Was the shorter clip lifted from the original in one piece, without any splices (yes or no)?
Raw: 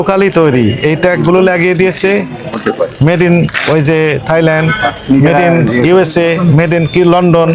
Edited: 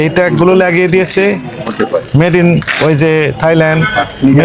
yes